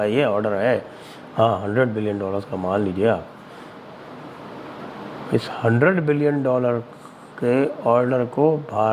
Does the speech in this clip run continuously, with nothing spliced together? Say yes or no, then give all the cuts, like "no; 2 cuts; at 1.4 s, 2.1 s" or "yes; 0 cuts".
yes; 0 cuts